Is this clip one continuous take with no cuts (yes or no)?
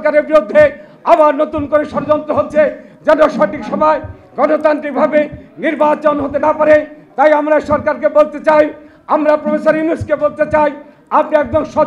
yes